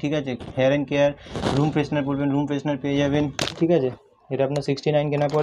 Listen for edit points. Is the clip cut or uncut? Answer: uncut